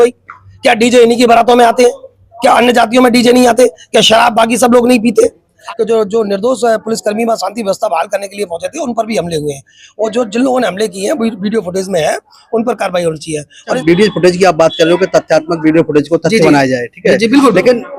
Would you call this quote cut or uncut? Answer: cut